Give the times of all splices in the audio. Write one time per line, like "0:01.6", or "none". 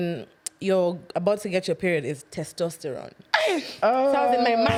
none